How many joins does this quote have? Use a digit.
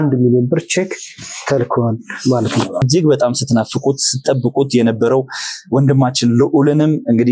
1